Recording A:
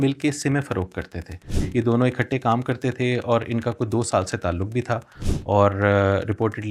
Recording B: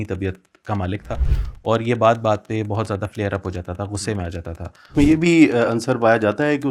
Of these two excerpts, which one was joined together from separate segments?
B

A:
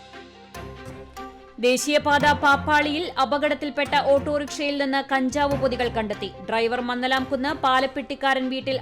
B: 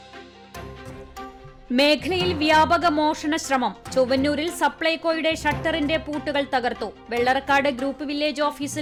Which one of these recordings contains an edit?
A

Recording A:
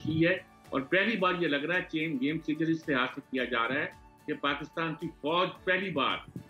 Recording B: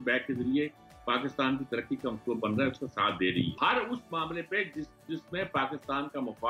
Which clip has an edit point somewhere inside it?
B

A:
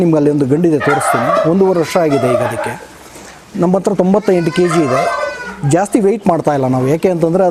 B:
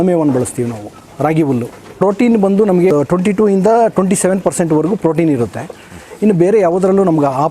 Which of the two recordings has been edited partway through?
B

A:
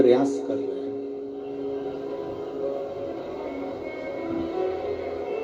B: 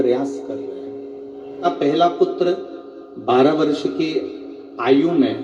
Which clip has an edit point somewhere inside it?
B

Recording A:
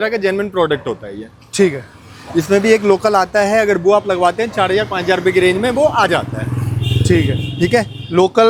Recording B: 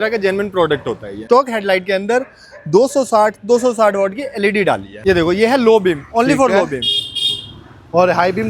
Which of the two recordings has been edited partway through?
B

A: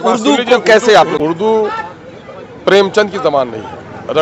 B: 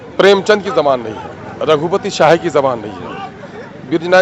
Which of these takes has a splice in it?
A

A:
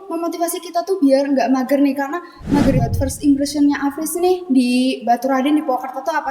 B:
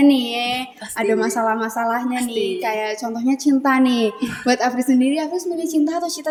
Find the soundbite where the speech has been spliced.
A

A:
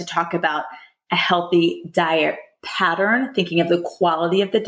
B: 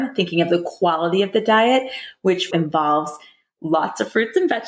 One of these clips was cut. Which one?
B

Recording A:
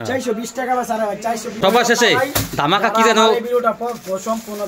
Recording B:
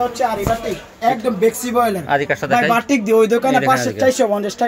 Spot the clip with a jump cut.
A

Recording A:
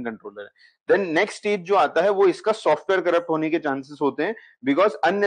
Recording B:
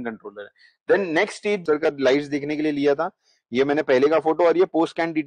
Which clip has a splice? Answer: B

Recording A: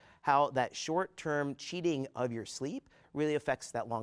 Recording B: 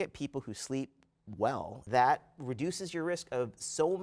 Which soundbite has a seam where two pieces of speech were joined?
B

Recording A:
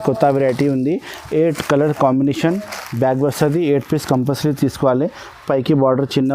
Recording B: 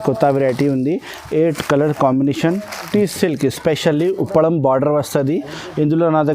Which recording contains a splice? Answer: B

